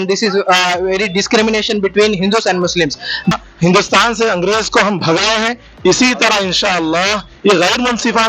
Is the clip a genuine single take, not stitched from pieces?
no; 1 cut; at 3.3 s

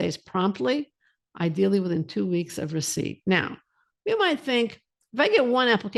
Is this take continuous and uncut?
yes; 0 cuts

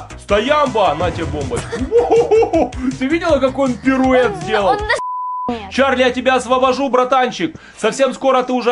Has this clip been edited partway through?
yes; 1 cut; at 5.2 s

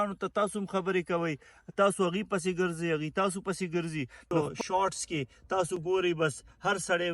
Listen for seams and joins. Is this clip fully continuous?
no; 1 cut; at 4.5 s

